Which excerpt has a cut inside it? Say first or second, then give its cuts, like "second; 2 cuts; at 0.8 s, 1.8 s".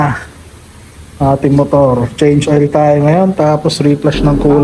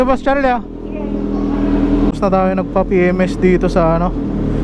second; 1 cut; at 2.1 s